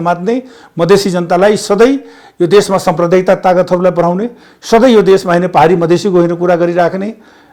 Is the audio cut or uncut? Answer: uncut